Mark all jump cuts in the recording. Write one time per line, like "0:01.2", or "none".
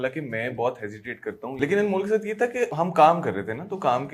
0:01.6
0:02.7